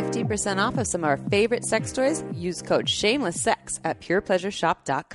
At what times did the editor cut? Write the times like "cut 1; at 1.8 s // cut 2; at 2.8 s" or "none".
none